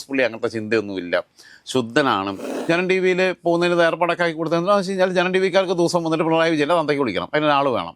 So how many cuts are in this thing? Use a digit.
1